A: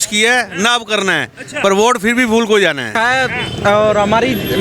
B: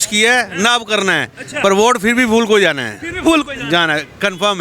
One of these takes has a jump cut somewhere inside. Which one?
A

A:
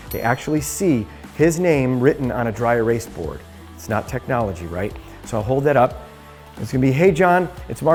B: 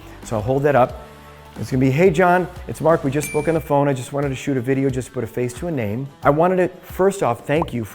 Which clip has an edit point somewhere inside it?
B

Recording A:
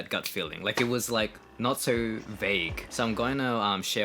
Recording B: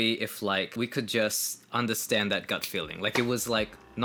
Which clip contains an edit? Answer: A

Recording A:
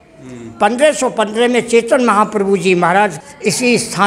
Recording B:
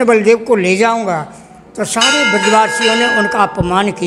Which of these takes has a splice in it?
A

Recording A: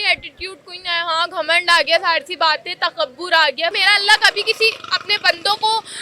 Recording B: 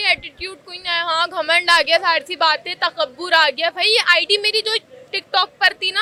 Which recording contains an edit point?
A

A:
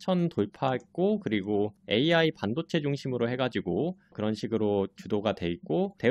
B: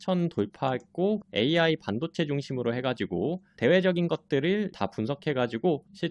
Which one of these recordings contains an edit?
B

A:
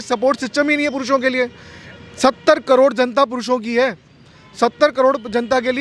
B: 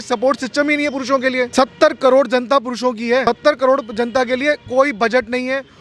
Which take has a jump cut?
B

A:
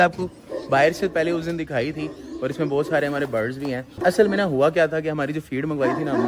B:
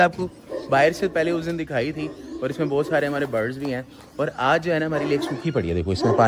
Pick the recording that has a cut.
A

